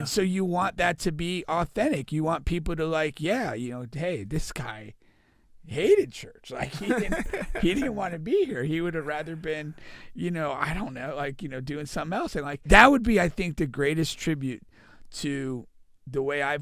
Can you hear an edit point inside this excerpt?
yes; 1 cut; at 12.6 s

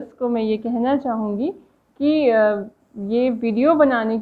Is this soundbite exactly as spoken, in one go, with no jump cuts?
yes; 0 cuts

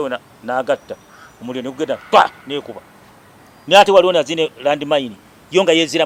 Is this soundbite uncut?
yes; 0 cuts

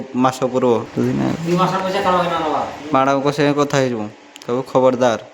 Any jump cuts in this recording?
yes; 2 cuts; at 0.9 s, 2.8 s

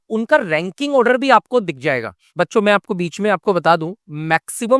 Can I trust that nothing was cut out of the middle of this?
no; 1 cut; at 2.3 s

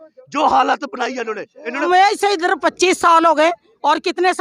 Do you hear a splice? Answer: yes; 1 cut; at 1.8 s

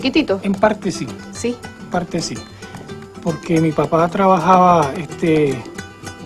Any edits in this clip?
yes; 1 cut; at 2.5 s

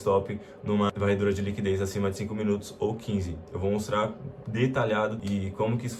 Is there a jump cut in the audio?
yes; 2 cuts; at 0.9 s, 5.2 s

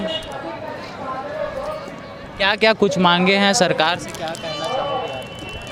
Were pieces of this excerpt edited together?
no; 0 cuts

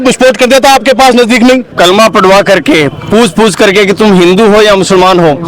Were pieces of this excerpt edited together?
yes; 1 cut; at 1.7 s

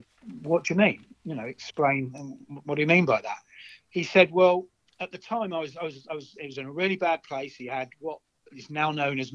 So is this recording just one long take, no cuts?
yes; 0 cuts

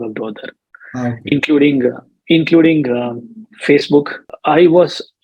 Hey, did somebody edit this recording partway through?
yes; 1 cut; at 4.3 s

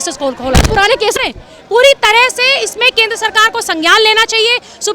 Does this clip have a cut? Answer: yes; 1 cut; at 1.1 s

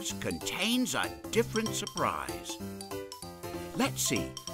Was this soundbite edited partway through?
yes; 2 cuts; at 1.2 s, 3.7 s

